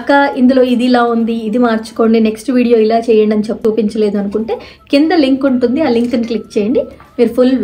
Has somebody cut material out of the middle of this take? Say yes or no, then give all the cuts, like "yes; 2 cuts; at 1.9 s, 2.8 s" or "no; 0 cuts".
yes; 1 cut; at 3.6 s